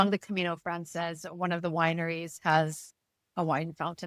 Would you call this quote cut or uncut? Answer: uncut